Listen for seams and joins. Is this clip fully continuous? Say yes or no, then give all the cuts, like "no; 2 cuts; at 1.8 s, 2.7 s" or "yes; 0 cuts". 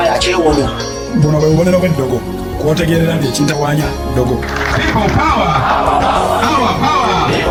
yes; 0 cuts